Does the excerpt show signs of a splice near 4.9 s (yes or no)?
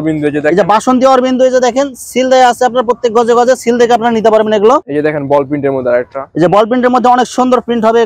yes